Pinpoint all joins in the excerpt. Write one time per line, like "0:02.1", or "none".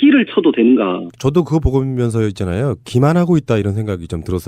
none